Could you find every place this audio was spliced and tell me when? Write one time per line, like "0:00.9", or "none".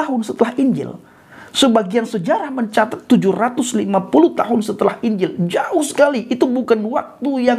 none